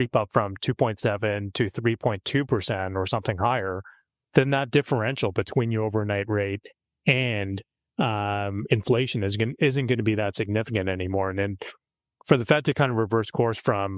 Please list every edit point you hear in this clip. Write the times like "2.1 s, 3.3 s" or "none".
none